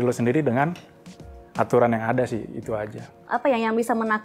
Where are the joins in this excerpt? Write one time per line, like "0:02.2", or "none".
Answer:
0:03.2